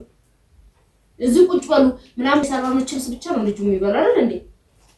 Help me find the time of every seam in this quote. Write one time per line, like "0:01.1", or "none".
0:02.4